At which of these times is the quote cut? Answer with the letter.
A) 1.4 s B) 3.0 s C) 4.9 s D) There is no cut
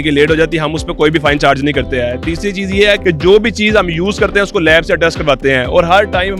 B